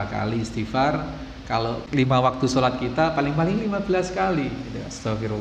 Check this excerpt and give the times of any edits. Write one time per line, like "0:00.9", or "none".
0:01.8

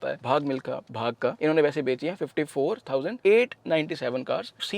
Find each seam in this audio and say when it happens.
none

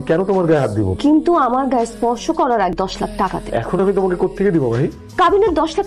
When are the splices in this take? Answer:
0:00.9
0:03.1

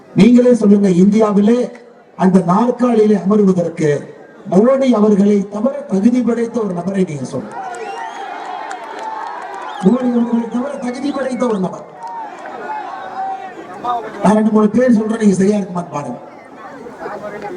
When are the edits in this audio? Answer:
none

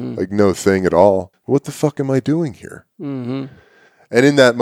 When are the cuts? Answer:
0:01.3

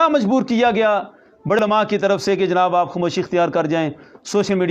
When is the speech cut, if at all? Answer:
0:01.6

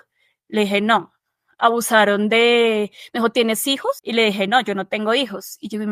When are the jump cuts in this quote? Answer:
0:04.0

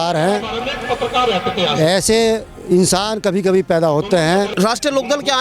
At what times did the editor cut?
0:04.5

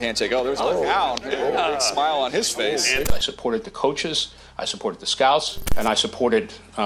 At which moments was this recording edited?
0:03.1

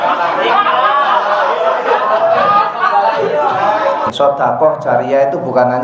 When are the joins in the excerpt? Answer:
0:04.1

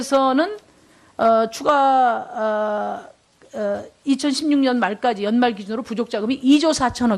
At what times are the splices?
0:02.2

